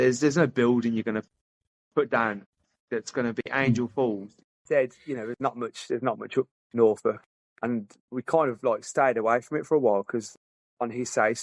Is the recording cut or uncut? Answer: cut